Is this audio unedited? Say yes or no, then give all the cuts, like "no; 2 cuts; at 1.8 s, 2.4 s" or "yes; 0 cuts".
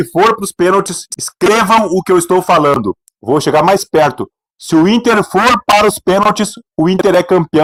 yes; 0 cuts